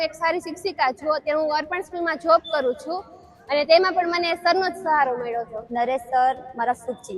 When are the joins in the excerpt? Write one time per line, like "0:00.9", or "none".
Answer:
0:05.6